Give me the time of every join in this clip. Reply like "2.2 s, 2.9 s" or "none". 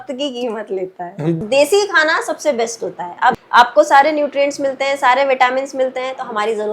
1.3 s, 3.4 s